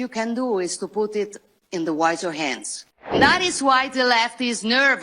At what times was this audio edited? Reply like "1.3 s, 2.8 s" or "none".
3.1 s